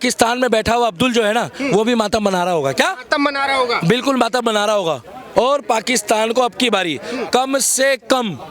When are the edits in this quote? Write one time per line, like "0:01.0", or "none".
0:05.2